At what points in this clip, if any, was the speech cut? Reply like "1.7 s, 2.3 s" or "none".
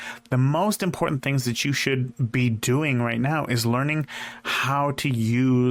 none

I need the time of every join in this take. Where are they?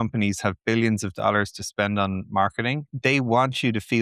2.9 s

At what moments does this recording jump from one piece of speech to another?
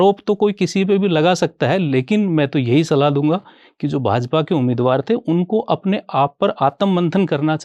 none

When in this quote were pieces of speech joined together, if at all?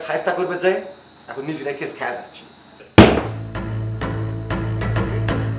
2.7 s

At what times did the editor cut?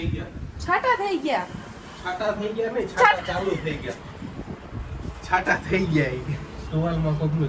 none

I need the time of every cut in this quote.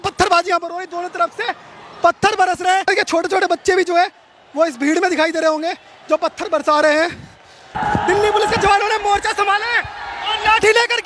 2.9 s, 7.8 s

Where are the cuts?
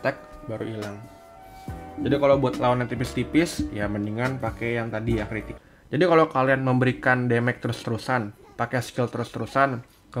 5.6 s

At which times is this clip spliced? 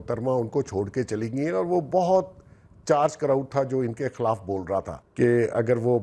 5.0 s

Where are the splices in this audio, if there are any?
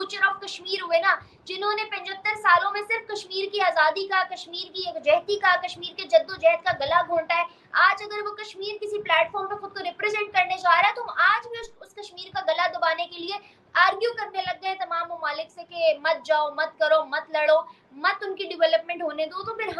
none

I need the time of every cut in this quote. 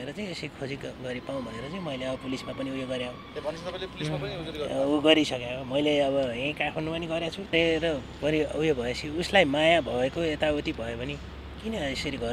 7.5 s

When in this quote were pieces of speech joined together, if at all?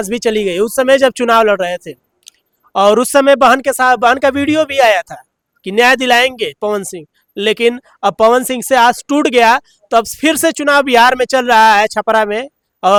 none

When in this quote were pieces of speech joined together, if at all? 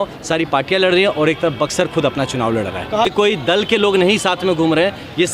3.1 s

